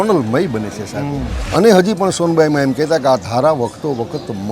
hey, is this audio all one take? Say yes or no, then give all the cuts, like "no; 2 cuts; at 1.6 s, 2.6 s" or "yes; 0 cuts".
no; 1 cut; at 1.3 s